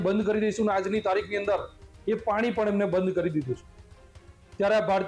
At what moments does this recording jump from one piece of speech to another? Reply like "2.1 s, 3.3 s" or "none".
none